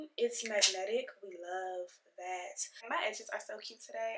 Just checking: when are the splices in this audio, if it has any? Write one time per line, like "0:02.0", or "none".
0:02.8